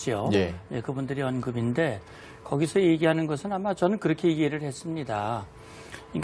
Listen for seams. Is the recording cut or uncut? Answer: uncut